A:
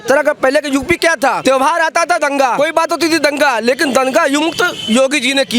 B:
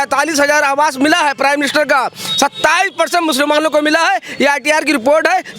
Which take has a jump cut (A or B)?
A